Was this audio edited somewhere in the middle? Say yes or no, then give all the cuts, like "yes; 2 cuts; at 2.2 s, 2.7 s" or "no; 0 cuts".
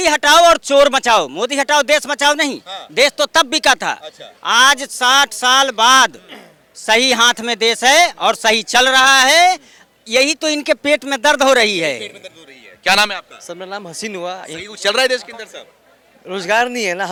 no; 0 cuts